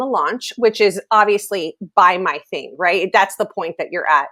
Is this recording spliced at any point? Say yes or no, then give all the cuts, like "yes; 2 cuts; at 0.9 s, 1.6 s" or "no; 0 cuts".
no; 0 cuts